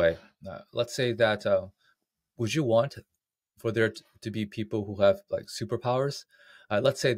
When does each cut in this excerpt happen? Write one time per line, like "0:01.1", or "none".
none